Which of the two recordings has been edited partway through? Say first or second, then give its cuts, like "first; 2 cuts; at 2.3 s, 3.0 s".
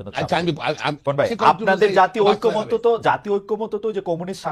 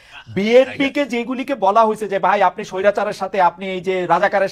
first; 1 cut; at 1.0 s